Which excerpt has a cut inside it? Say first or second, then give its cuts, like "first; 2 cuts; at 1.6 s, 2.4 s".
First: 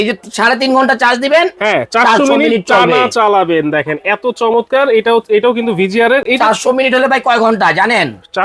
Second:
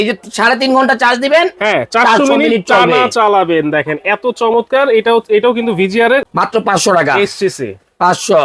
second; 1 cut; at 6.2 s